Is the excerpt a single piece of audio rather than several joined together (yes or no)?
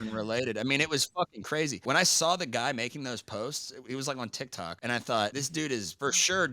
no